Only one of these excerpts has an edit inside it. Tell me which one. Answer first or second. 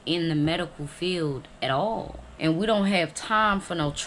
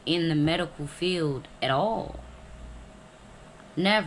first